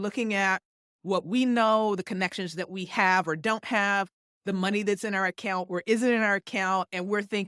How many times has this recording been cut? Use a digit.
0